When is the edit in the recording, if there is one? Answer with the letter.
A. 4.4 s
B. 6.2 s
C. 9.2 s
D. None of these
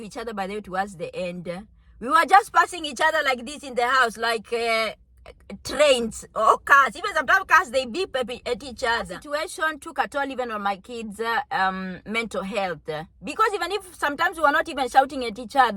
C